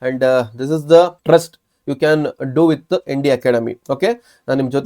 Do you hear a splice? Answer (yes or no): yes